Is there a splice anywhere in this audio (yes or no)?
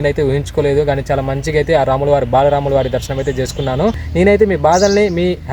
yes